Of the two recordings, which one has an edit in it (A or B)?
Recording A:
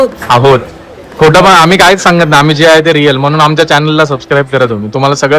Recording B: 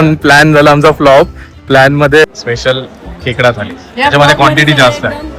B